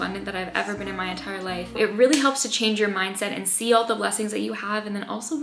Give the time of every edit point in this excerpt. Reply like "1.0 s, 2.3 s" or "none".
1.8 s